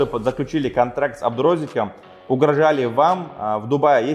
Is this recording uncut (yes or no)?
yes